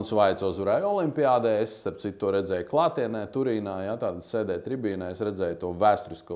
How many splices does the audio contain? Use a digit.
0